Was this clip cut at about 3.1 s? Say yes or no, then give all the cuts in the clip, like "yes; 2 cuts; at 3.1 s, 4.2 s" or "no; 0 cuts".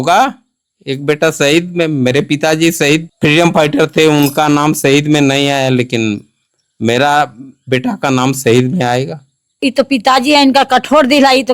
yes; 2 cuts; at 3.1 s, 9.6 s